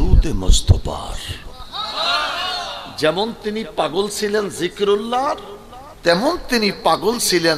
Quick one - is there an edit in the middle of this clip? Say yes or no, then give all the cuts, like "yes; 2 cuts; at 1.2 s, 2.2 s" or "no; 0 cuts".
no; 0 cuts